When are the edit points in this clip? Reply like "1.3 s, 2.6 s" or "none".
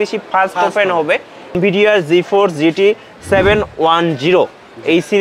1.6 s